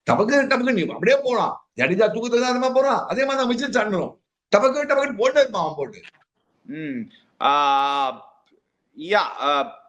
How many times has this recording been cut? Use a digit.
0